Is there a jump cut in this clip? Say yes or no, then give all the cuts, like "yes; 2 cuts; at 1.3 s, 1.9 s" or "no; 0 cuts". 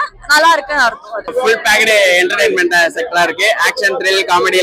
yes; 1 cut; at 1.3 s